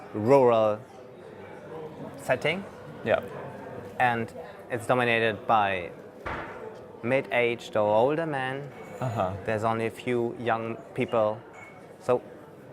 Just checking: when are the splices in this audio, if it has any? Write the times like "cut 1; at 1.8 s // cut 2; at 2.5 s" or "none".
cut 1; at 4.0 s

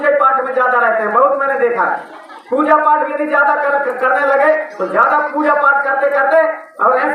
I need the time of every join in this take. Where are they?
none

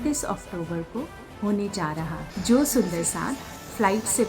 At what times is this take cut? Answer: cut 1; at 2.3 s

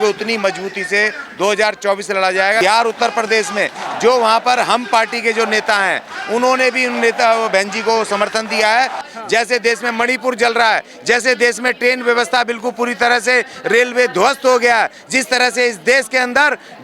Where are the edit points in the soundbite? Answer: cut 1; at 2.6 s // cut 2; at 9.0 s

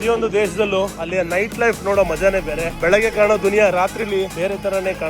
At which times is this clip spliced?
cut 1; at 1.0 s // cut 2; at 2.7 s // cut 3; at 4.3 s

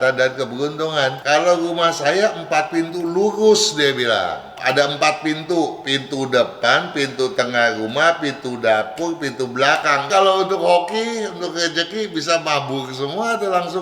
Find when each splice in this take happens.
cut 1; at 1.2 s // cut 2; at 4.5 s // cut 3; at 10.1 s

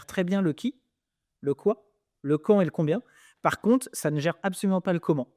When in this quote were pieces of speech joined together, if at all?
none

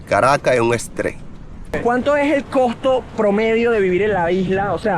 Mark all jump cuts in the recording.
cut 1; at 1.6 s

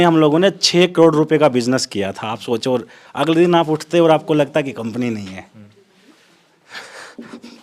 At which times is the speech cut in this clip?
none

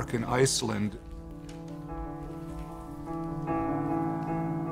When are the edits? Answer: none

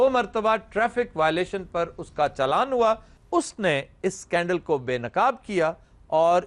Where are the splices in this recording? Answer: cut 1; at 3.1 s

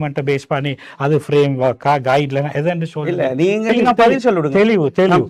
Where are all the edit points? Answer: cut 1; at 3.7 s

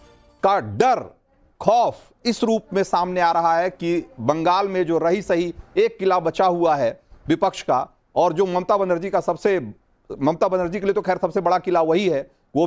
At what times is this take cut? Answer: cut 1; at 11.6 s

